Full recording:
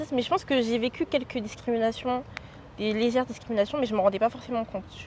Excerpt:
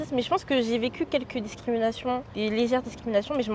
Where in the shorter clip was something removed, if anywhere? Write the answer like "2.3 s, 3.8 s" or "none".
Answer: 2.3 s

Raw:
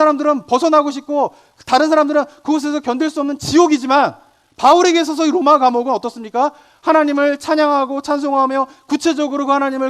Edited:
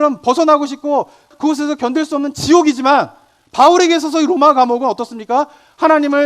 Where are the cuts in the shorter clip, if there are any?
1.3 s

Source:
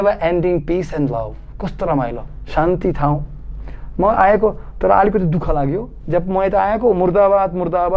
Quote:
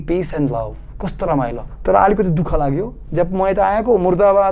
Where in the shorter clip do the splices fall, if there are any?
1.7 s

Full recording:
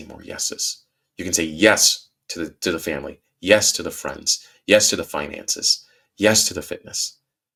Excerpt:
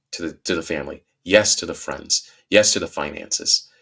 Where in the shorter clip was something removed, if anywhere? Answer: none

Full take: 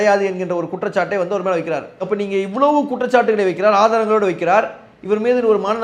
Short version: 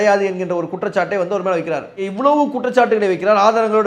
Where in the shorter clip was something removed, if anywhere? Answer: 2.0 s

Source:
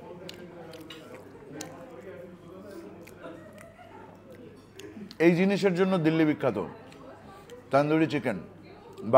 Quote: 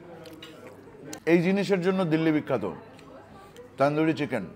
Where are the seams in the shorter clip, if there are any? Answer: 1.2 s

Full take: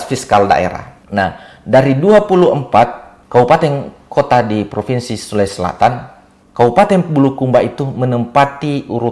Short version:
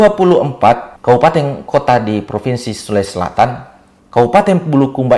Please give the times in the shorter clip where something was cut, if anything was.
0.9 s, 1.6 s

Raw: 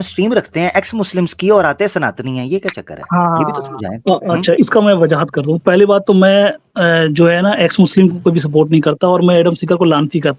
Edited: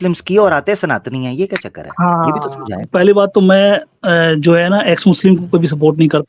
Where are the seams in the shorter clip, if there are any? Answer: 2.8 s

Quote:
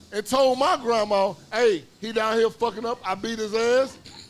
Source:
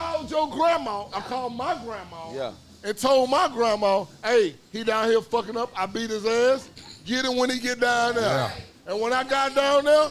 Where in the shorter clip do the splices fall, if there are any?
none

